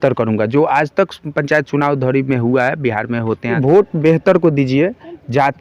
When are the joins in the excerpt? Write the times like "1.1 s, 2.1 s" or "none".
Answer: 3.5 s

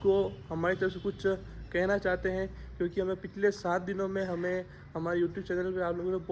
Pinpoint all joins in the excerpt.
none

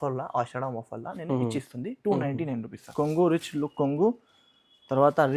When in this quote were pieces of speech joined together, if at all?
2.8 s

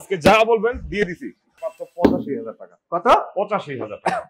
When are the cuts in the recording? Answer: 1.6 s

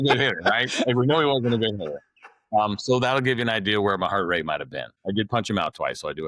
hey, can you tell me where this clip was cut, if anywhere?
4.9 s

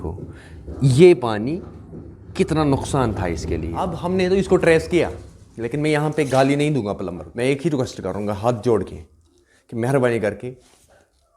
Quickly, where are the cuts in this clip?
4.0 s, 7.2 s

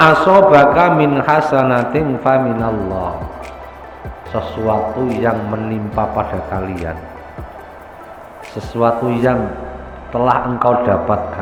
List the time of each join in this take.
none

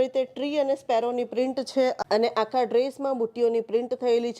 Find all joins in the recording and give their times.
2.0 s

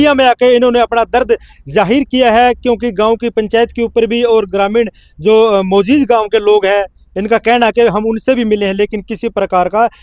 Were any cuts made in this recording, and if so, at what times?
none

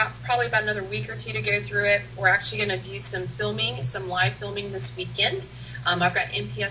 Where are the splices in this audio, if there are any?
4.8 s

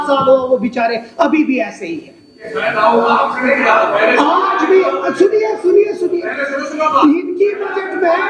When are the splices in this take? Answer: none

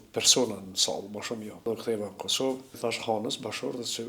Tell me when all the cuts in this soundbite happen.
1.7 s, 2.8 s

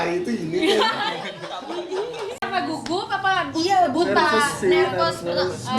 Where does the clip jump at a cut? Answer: 2.4 s

